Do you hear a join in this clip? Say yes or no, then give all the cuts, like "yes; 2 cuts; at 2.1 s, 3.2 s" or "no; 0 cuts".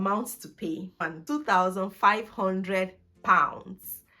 yes; 1 cut; at 1.0 s